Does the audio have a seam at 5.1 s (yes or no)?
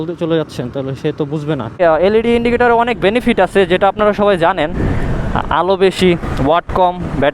yes